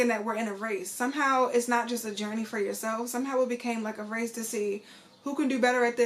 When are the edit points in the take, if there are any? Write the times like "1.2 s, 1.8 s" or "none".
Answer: none